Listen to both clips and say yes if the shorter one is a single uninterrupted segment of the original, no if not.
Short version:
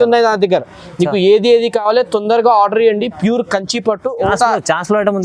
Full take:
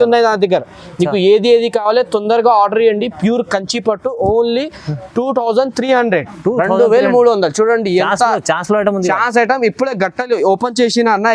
no